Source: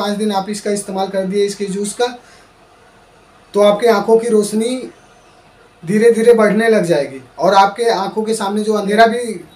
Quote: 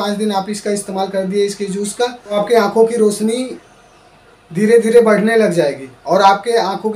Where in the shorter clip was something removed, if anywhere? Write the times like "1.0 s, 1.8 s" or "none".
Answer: 2.3 s